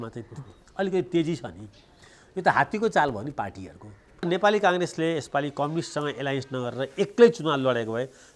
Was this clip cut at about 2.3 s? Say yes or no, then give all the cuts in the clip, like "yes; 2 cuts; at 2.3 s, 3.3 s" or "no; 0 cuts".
no; 1 cut; at 4.3 s